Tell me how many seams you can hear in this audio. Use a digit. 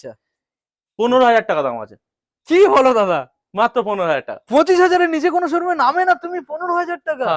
0